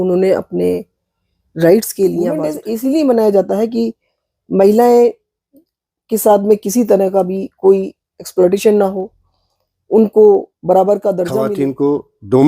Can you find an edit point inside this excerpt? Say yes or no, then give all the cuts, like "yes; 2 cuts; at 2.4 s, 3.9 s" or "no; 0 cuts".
yes; 2 cuts; at 2.6 s, 11.5 s